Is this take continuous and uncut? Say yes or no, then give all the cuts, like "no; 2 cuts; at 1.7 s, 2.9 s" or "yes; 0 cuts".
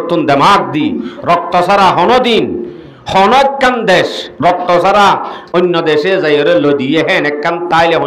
yes; 0 cuts